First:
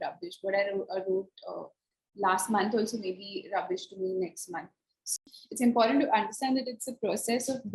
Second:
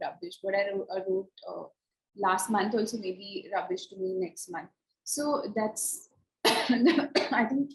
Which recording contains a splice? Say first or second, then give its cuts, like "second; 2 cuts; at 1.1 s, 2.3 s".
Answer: first; 1 cut; at 5.2 s